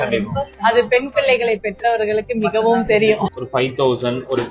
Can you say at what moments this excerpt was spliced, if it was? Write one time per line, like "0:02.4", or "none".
0:03.3